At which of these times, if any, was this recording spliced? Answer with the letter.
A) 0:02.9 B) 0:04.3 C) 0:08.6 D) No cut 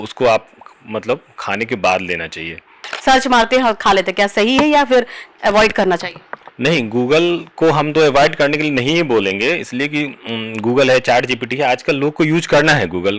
A